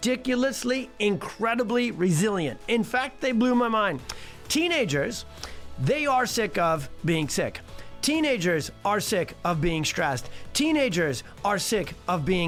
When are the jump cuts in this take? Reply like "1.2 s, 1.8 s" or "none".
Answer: none